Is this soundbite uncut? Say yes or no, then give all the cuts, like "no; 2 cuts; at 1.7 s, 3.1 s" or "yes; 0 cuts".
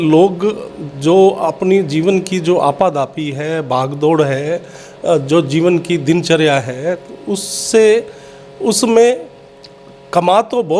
yes; 0 cuts